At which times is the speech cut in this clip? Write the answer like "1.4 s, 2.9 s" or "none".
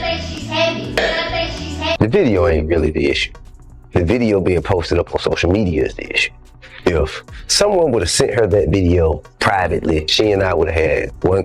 1.3 s